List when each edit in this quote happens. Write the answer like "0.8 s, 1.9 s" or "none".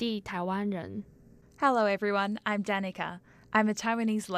none